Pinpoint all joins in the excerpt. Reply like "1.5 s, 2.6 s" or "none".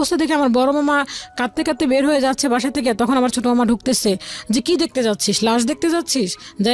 none